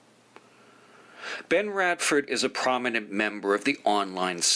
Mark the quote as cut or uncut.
cut